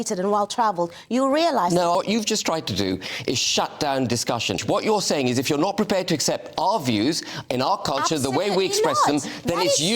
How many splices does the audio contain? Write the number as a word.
two